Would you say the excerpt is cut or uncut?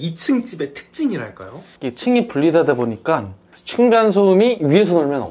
uncut